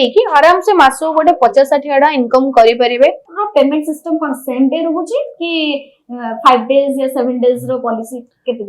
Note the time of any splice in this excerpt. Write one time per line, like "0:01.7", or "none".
0:03.3